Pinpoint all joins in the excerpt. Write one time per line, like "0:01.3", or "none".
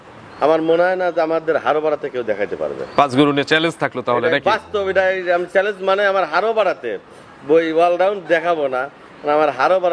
none